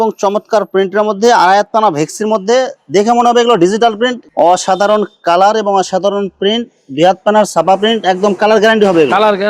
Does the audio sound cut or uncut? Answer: cut